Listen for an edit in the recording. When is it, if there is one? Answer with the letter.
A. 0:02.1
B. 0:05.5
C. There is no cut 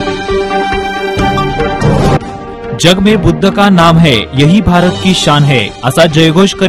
A